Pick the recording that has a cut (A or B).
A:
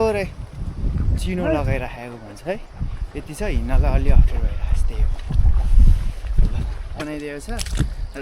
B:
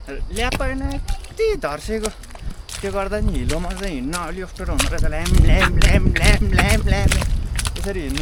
A